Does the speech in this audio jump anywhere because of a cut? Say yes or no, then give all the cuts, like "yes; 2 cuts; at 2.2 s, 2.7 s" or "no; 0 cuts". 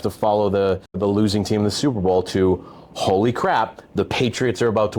yes; 1 cut; at 1.0 s